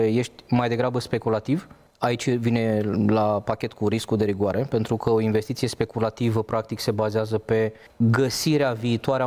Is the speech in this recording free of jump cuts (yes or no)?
no